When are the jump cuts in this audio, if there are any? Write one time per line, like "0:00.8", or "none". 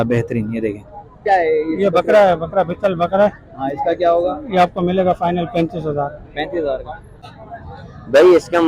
0:01.2
0:07.1